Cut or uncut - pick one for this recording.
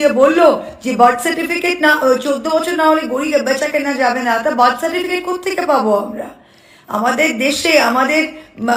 uncut